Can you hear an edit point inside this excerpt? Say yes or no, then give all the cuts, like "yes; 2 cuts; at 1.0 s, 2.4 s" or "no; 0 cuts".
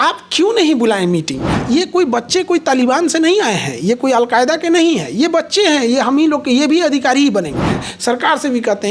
yes; 2 cuts; at 1.6 s, 7.9 s